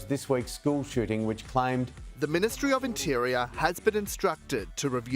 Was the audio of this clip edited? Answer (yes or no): no